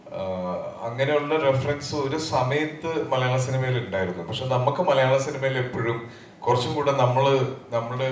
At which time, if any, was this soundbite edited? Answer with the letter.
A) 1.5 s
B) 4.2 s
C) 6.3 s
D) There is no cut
B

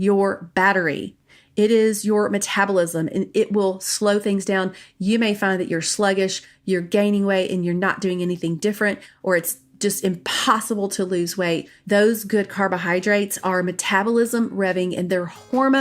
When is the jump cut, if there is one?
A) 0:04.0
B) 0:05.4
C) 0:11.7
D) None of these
C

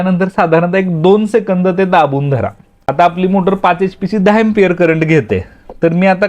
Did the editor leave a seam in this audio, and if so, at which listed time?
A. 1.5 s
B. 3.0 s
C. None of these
B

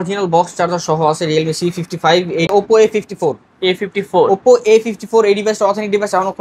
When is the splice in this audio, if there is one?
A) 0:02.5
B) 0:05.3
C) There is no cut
A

